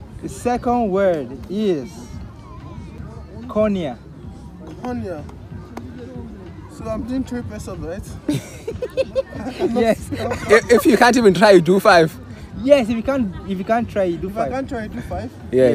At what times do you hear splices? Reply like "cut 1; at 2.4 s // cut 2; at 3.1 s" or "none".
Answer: cut 1; at 3.0 s